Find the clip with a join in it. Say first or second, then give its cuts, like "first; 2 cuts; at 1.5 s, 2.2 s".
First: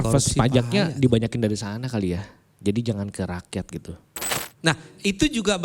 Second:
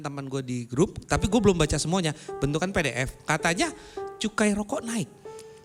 first; 1 cut; at 4.1 s